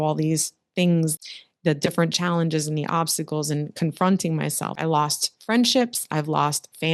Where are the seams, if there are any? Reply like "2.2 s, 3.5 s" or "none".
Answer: 1.2 s, 4.8 s